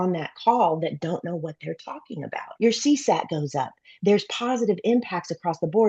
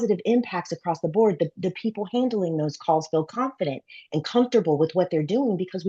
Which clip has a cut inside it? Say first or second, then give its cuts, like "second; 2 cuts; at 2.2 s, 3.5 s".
first; 1 cut; at 2.5 s